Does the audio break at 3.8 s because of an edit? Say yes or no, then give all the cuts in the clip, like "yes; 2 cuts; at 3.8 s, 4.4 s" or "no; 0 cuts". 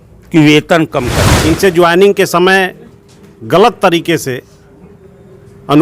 no; 1 cut; at 1.2 s